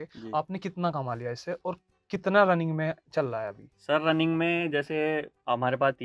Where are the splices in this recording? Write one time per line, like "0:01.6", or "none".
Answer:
none